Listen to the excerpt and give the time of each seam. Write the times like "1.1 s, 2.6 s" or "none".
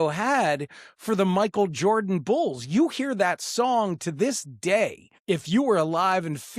5.1 s